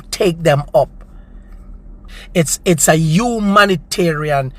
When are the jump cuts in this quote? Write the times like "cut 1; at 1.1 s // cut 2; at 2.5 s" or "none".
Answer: cut 1; at 2.1 s